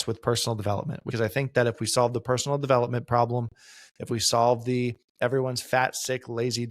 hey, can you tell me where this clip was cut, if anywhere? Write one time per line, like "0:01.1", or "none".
0:01.0